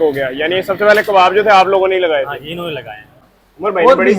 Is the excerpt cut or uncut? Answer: cut